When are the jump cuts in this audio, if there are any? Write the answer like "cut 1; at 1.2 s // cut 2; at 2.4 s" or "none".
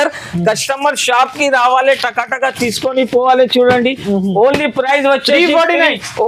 none